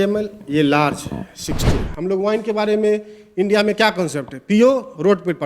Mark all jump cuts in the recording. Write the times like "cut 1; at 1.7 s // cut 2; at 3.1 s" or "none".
cut 1; at 1.8 s